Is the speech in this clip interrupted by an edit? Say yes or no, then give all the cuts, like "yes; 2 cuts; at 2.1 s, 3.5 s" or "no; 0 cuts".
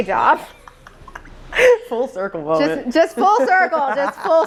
no; 0 cuts